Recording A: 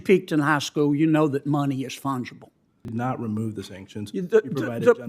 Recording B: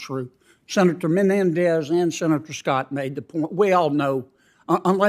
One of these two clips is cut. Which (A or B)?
A